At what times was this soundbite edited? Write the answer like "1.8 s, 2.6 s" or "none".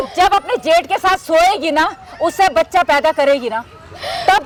none